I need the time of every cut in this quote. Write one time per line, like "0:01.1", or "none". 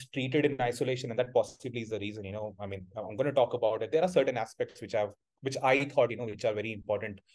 none